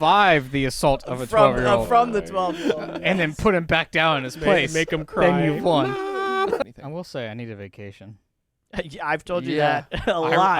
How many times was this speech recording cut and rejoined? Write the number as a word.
one